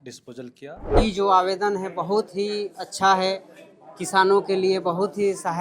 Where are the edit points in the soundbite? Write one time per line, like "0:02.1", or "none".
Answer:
0:00.9